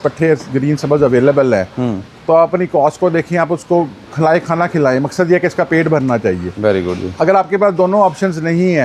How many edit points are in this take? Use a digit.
0